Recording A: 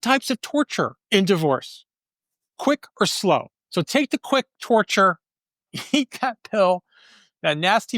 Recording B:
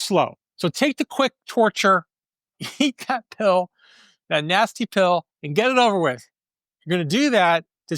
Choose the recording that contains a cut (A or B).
A